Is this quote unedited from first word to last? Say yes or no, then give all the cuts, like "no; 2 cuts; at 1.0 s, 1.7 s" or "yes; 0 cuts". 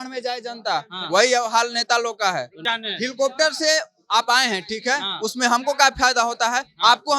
no; 1 cut; at 2.7 s